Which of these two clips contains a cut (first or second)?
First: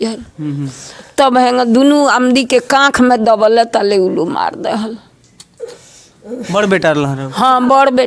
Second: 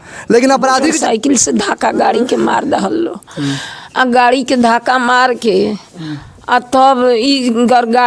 second